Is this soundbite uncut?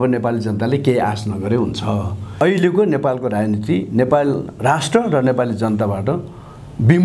no; 1 cut; at 2.4 s

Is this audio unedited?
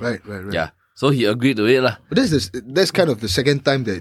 yes; 0 cuts

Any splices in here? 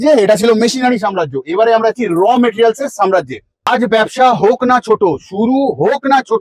yes; 1 cut; at 3.7 s

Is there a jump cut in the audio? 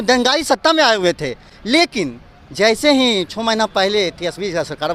no; 0 cuts

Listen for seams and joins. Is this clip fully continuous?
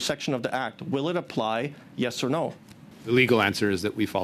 no; 1 cut; at 2.9 s

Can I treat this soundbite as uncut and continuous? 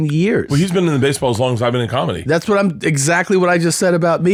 yes; 0 cuts

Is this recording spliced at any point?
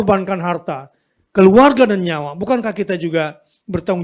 no; 0 cuts

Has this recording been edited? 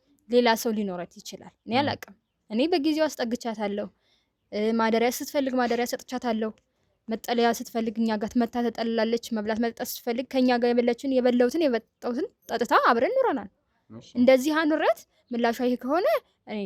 no; 0 cuts

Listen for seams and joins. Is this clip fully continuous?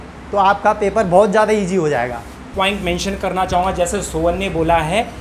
no; 1 cut; at 2.5 s

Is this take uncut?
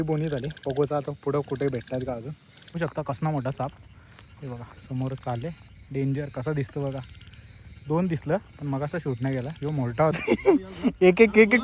no; 2 cuts; at 2.8 s, 10.1 s

